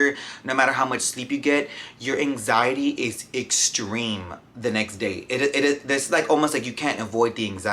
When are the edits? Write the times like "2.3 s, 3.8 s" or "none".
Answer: none